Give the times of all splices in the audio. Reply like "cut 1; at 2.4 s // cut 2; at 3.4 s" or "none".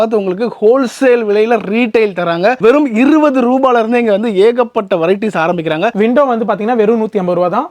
cut 1; at 5.9 s